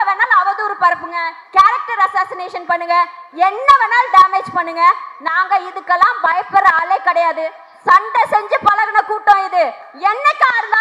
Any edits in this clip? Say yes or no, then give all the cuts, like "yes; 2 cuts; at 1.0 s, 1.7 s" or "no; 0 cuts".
no; 0 cuts